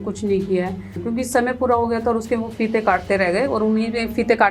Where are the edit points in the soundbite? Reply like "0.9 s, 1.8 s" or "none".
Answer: 1.0 s